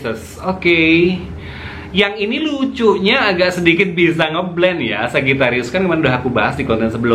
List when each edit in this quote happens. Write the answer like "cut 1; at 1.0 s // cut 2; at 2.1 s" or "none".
none